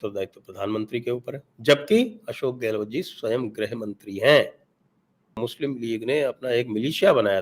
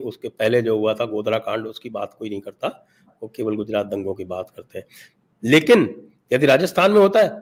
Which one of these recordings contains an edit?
first; 1 cut; at 5.4 s

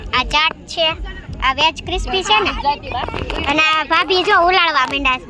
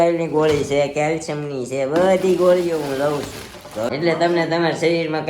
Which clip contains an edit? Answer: second; 1 cut; at 3.9 s

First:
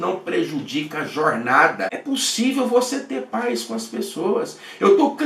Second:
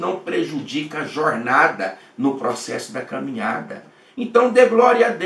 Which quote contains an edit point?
first; 1 cut; at 2.0 s

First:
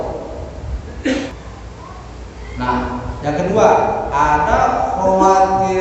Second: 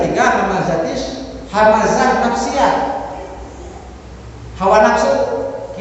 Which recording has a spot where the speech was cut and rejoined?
first; 1 cut; at 1.3 s

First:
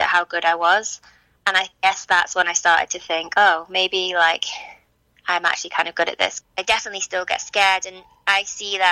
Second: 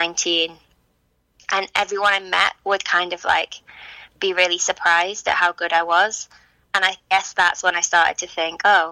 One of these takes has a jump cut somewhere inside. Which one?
first; 1 cut; at 6.3 s

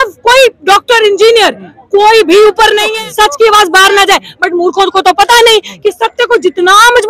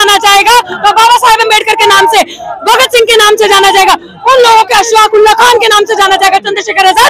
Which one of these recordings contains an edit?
first; 1 cut; at 3.0 s

